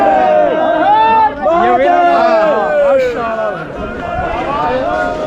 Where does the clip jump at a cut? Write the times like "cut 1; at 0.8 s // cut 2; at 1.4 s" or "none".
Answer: none